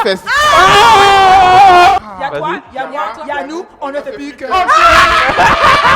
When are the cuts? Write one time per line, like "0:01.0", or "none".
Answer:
0:02.0